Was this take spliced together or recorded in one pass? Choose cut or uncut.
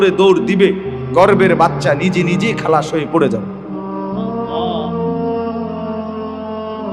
cut